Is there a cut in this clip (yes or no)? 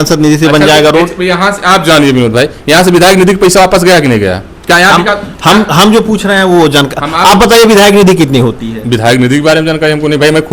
no